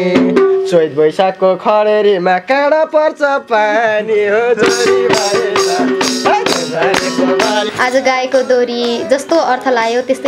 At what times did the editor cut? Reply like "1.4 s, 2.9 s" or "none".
7.7 s